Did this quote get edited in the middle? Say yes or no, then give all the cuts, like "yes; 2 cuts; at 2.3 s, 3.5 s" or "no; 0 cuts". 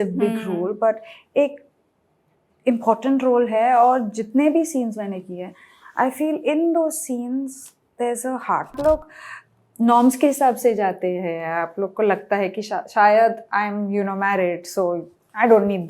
yes; 1 cut; at 8.8 s